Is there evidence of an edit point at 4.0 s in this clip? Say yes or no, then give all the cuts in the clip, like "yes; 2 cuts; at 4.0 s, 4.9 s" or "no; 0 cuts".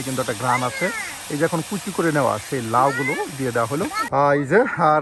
yes; 1 cut; at 4.0 s